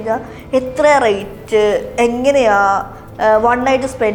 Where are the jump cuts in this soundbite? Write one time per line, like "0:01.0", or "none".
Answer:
none